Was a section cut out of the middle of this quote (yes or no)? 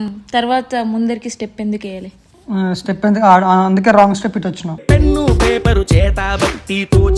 no